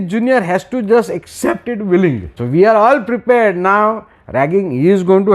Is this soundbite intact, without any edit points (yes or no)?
no